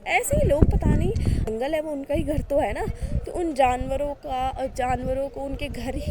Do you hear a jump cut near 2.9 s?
no; 1 cut; at 1.5 s

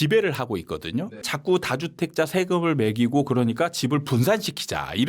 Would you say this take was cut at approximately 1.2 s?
yes; 1 cut; at 1.2 s

